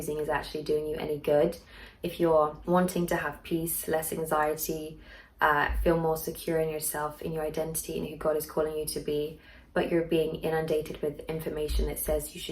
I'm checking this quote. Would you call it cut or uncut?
cut